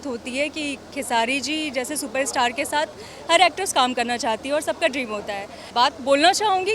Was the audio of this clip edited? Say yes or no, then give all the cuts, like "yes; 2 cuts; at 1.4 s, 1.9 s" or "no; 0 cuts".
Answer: yes; 1 cut; at 5.5 s